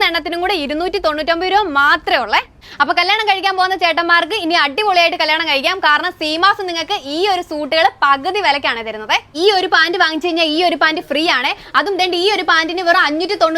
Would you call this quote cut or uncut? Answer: cut